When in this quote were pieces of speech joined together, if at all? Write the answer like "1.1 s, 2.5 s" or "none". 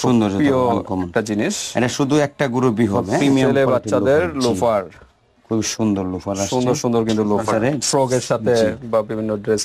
3.1 s, 7.3 s